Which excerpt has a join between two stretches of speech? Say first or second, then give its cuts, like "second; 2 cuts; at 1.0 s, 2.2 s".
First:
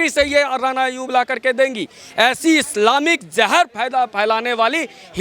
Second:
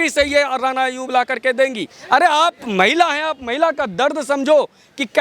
second; 1 cut; at 1.9 s